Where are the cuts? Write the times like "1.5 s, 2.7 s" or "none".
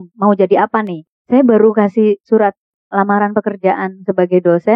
0.9 s